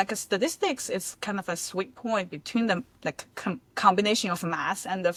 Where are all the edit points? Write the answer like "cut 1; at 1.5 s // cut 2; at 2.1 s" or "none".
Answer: none

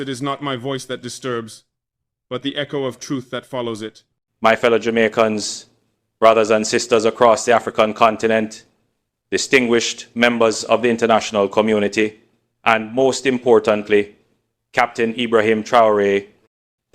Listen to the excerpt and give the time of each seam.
cut 1; at 4.3 s

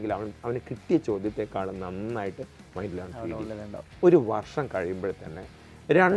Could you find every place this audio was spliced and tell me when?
cut 1; at 3.9 s

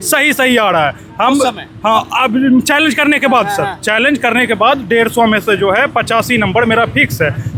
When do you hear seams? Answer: none

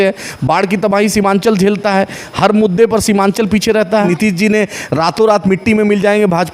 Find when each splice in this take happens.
cut 1; at 4.1 s

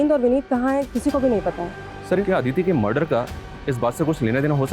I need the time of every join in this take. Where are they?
cut 1; at 2.2 s

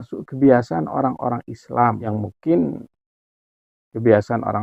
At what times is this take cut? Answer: cut 1; at 2.0 s

